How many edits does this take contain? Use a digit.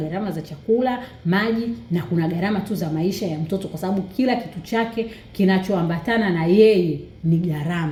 0